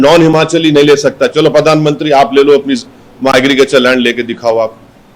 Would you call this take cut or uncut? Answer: uncut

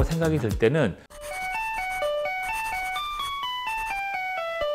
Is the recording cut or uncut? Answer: cut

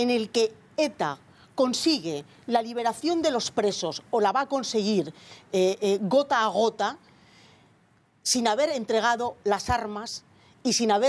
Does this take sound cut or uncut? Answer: cut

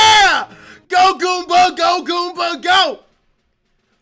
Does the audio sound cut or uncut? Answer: uncut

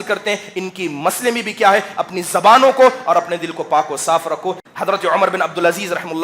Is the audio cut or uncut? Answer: cut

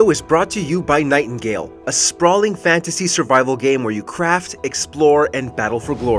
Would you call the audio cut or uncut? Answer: uncut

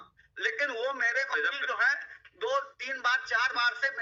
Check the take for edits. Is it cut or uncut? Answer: uncut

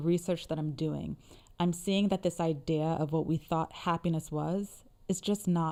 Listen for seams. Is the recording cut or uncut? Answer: uncut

